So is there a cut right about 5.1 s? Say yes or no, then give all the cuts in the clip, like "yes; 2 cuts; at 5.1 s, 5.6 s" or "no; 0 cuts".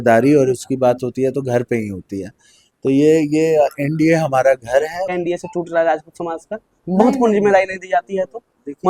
yes; 1 cut; at 5.1 s